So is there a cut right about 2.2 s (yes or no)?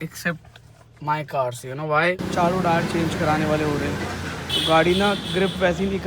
yes